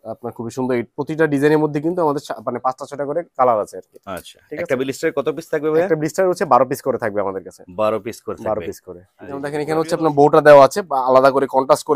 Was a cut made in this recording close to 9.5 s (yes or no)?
yes